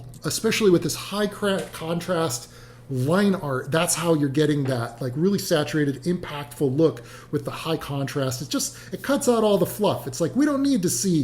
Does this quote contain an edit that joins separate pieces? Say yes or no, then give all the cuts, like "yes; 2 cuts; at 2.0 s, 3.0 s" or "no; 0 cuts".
no; 0 cuts